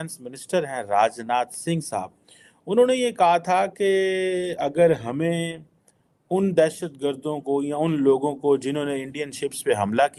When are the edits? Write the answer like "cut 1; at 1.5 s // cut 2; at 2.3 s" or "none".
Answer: none